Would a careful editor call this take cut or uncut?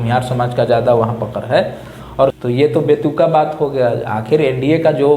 cut